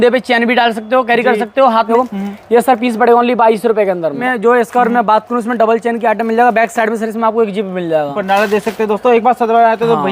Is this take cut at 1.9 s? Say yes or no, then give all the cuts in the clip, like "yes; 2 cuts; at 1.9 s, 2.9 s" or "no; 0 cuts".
yes; 3 cuts; at 1.9 s, 4.2 s, 8.1 s